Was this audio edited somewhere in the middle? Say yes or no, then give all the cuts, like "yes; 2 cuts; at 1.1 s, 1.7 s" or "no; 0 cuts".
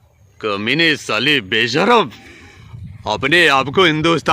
no; 0 cuts